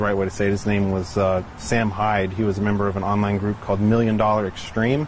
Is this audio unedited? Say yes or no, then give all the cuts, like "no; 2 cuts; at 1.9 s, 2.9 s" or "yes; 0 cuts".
yes; 0 cuts